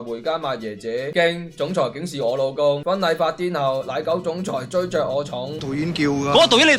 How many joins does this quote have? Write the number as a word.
one